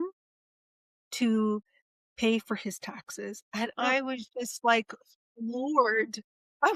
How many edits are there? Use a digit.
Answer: 0